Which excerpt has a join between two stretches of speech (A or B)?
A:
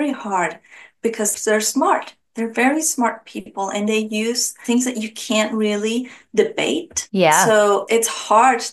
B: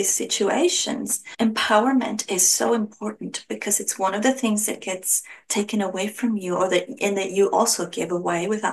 A